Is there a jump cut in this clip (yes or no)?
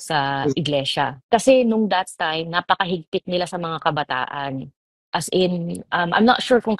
yes